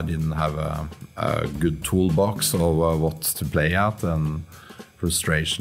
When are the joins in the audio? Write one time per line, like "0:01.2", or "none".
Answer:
none